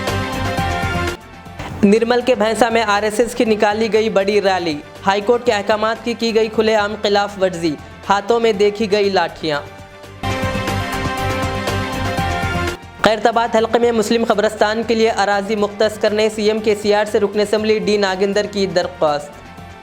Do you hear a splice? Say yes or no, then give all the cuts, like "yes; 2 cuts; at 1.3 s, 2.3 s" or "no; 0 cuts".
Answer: yes; 1 cut; at 1.0 s